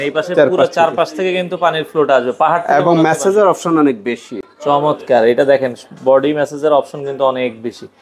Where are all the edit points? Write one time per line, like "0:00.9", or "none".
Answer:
none